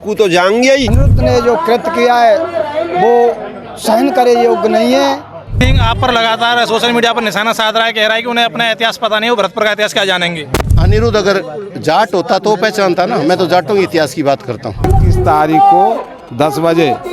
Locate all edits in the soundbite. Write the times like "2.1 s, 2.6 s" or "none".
1.1 s, 5.6 s, 10.8 s, 15.0 s